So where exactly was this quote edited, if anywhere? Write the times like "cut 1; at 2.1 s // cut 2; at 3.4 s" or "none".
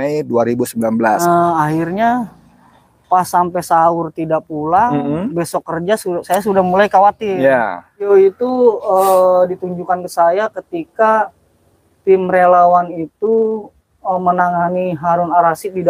cut 1; at 1.2 s // cut 2; at 8.1 s